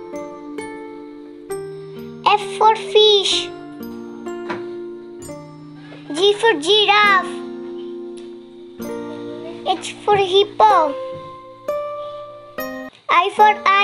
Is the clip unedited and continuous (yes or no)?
no